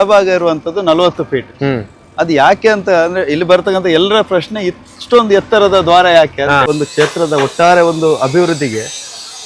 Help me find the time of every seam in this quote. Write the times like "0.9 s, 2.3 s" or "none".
6.7 s